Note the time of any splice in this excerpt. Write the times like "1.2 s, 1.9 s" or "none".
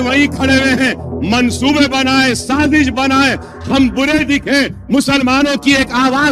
none